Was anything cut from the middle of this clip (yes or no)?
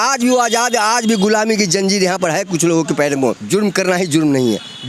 yes